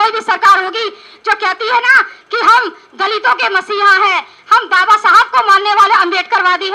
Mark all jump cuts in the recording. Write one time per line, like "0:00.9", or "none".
none